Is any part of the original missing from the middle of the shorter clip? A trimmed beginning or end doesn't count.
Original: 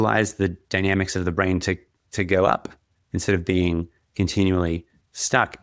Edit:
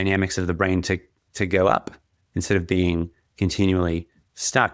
no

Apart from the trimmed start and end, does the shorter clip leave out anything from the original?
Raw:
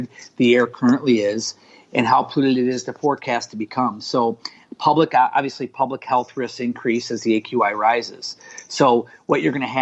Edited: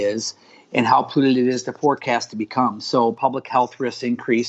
yes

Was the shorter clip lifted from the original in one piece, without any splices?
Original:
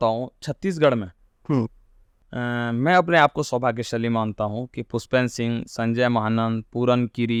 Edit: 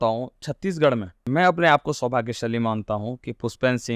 no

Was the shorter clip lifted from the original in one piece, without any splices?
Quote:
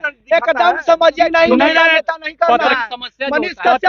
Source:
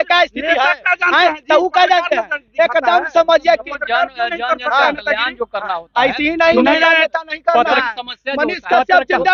no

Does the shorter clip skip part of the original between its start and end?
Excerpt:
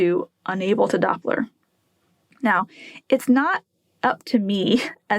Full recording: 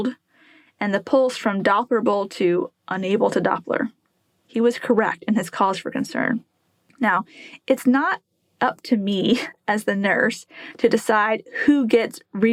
yes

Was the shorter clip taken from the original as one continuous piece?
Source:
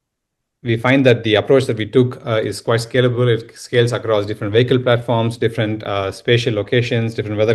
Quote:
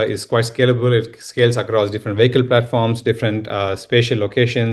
yes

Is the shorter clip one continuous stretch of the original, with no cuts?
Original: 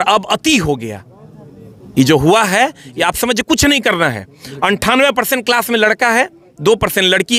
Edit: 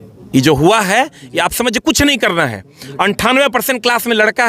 yes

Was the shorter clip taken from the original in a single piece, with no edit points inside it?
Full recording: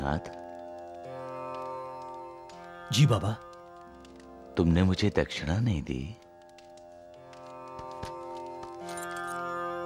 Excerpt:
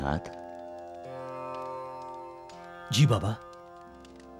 yes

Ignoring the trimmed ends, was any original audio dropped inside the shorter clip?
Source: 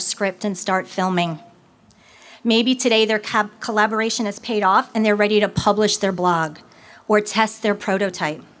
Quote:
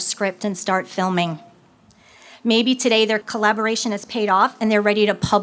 yes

